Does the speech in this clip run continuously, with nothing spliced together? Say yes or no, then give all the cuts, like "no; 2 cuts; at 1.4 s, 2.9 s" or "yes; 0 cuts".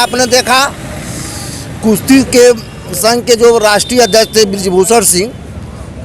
yes; 0 cuts